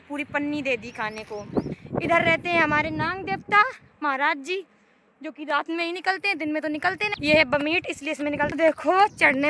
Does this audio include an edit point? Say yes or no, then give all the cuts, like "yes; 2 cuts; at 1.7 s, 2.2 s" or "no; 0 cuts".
yes; 2 cuts; at 1.8 s, 8.5 s